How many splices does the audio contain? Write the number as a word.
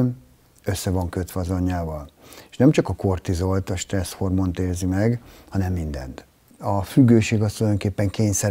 one